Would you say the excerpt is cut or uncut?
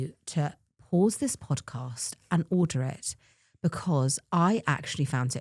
uncut